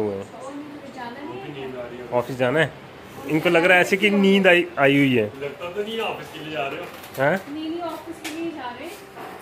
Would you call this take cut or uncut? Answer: uncut